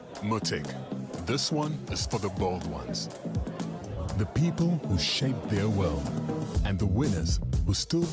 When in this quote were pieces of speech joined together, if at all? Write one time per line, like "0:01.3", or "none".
none